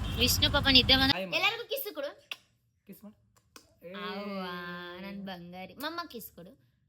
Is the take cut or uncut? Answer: cut